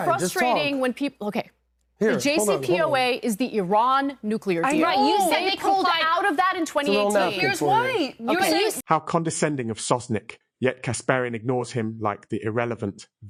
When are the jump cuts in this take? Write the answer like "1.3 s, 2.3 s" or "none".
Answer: none